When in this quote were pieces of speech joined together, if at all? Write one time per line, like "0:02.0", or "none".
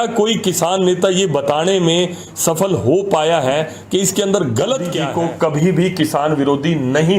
0:05.0